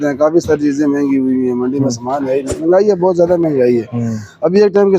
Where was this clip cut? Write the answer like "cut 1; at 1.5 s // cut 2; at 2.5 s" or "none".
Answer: cut 1; at 2.5 s